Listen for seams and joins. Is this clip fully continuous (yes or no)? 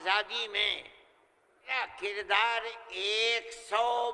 no